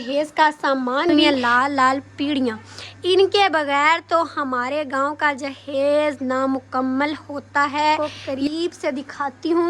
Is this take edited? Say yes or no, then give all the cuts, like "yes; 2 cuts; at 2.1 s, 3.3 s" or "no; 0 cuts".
yes; 2 cuts; at 1.1 s, 8.0 s